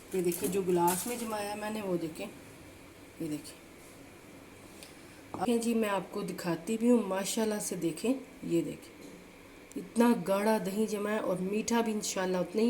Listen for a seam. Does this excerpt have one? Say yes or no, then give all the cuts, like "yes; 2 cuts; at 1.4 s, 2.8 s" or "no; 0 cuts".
yes; 1 cut; at 5.5 s